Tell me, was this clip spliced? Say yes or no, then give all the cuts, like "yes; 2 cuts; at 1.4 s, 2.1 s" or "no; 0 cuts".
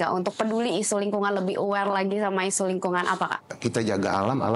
yes; 1 cut; at 3.5 s